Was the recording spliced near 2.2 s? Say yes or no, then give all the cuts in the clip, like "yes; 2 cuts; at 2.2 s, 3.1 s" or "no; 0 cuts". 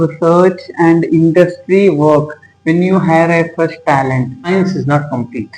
no; 1 cut; at 4.5 s